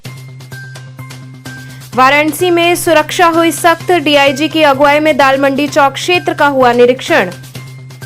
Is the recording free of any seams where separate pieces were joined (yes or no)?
no